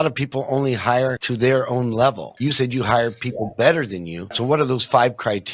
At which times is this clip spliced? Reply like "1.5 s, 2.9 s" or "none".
1.2 s, 2.3 s, 4.3 s